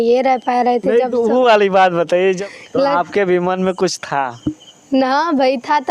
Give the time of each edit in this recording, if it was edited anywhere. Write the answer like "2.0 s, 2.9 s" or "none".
2.4 s